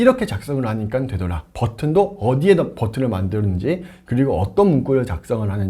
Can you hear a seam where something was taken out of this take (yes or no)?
no